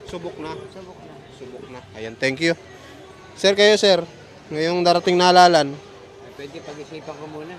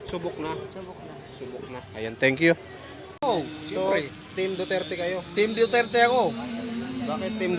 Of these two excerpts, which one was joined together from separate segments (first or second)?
second